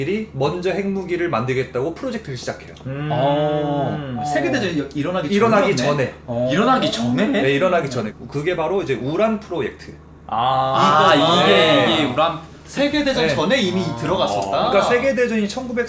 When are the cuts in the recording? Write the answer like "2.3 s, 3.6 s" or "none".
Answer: none